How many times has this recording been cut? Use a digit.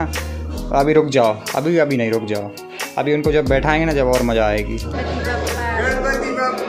1